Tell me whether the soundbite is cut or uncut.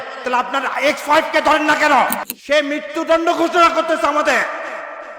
cut